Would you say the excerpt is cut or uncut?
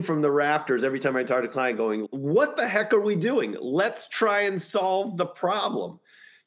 cut